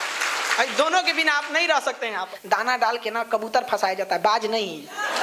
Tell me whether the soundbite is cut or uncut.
cut